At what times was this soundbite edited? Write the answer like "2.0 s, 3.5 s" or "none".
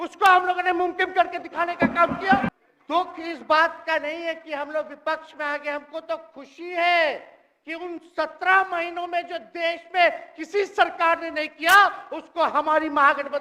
2.5 s